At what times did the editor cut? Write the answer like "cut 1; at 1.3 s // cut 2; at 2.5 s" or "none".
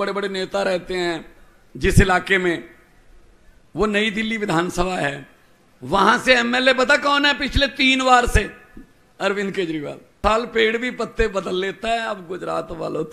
cut 1; at 10.2 s